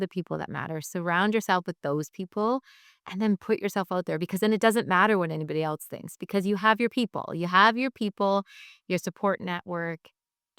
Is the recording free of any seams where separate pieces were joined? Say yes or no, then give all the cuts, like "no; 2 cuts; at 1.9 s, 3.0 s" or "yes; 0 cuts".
yes; 0 cuts